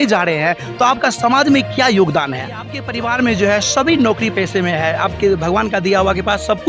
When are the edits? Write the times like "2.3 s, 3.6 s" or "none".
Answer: 2.8 s